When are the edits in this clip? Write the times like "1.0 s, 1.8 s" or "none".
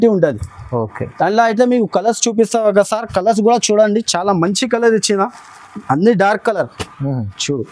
none